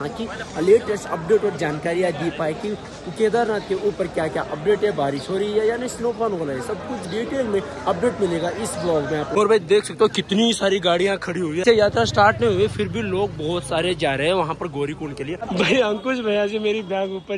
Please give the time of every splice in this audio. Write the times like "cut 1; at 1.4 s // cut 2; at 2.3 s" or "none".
cut 1; at 9.3 s // cut 2; at 11.6 s // cut 3; at 15.4 s